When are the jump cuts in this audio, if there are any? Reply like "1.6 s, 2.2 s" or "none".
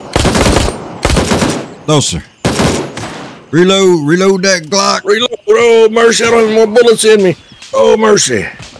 none